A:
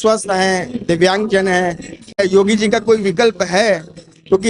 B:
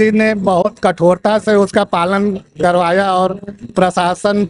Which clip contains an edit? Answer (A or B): A